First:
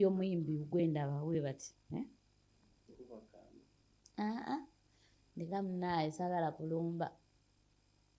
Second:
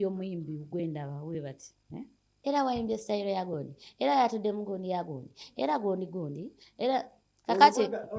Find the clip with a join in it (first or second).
second